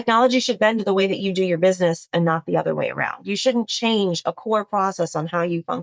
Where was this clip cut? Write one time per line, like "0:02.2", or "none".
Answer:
none